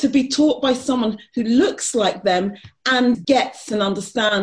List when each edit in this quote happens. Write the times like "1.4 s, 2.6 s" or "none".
3.2 s

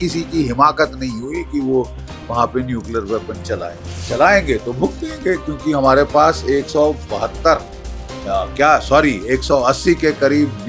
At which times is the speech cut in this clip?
3.9 s

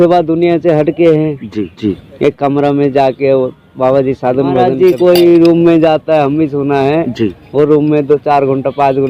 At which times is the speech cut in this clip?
1.8 s, 4.7 s

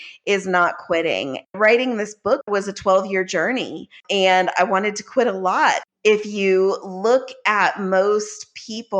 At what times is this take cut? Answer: 1.6 s, 2.5 s, 4.0 s, 5.8 s

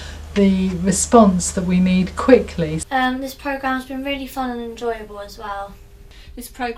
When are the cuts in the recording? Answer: 2.8 s, 5.8 s

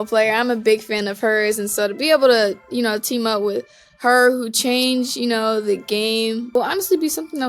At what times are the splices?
6.6 s

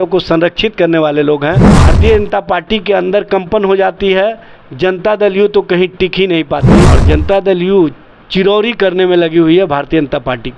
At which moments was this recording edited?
1.7 s, 6.9 s

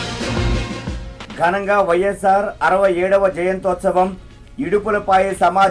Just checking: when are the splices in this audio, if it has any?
none

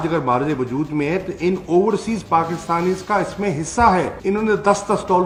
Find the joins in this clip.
none

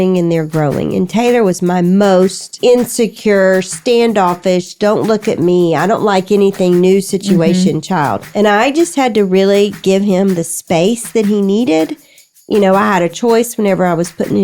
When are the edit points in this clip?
2.5 s, 8.2 s

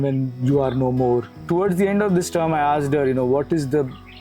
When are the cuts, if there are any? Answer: 1.3 s

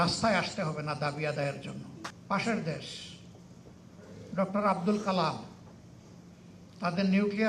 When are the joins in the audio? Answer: 2.0 s

